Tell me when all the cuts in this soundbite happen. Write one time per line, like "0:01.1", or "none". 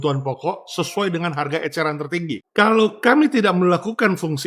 0:02.4